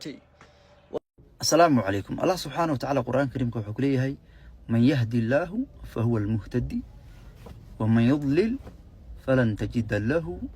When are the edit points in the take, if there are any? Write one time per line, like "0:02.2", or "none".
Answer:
0:01.0